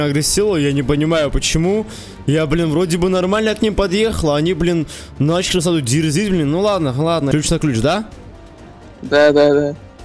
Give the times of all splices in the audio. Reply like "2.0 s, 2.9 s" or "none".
7.3 s